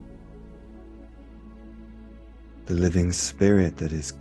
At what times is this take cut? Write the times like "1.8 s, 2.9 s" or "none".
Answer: none